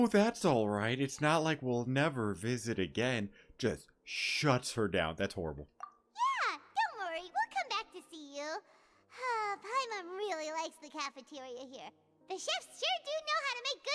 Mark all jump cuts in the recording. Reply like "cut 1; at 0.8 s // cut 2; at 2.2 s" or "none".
none